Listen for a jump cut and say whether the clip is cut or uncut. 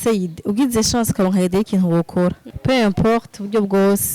cut